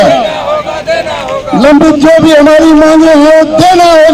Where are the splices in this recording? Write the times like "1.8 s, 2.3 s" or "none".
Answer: none